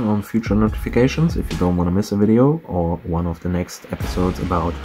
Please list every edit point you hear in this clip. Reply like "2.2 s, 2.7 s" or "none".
none